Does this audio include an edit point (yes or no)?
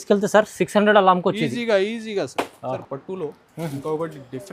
no